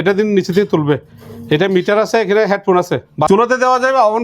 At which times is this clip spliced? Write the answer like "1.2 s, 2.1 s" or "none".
3.3 s